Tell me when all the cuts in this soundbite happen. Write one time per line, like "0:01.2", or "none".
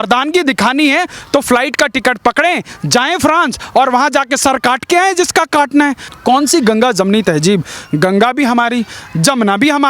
0:06.1